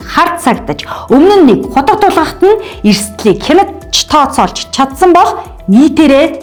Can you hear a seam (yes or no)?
no